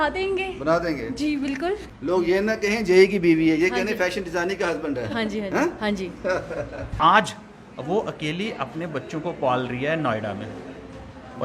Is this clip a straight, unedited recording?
no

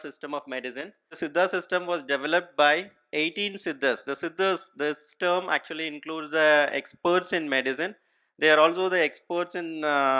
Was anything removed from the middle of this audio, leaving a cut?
yes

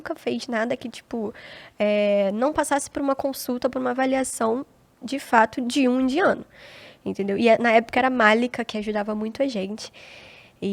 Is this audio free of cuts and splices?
yes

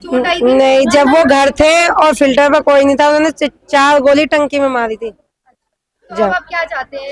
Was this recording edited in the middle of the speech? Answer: no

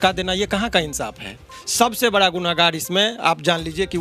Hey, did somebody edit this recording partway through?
yes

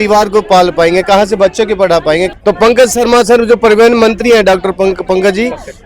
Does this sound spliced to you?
yes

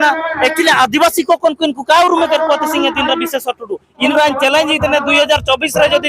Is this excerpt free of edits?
no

